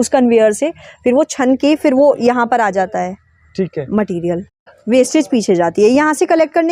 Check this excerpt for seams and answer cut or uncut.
cut